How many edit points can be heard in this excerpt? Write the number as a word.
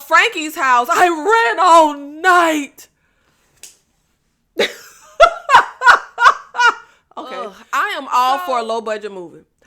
one